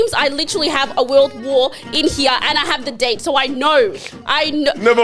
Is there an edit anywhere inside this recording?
no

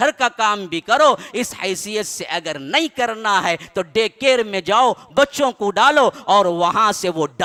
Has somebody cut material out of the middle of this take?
no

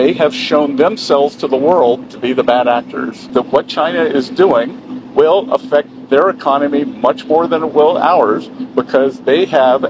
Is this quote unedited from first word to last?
no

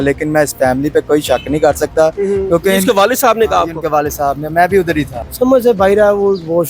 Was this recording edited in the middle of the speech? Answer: yes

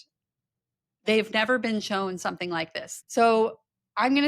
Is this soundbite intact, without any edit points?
no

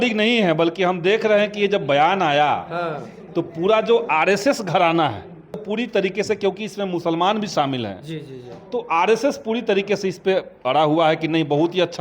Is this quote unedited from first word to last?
no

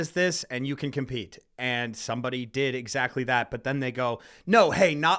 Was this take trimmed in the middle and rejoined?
no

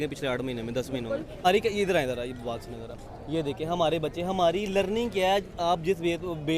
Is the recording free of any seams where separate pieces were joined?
no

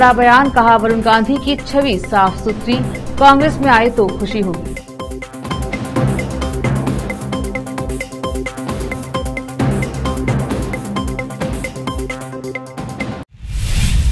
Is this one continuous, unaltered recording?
no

